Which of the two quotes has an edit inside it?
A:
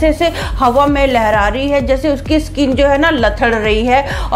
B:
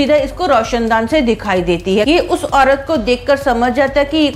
B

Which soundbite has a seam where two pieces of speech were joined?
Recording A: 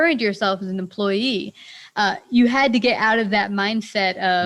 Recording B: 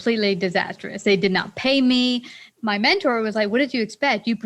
B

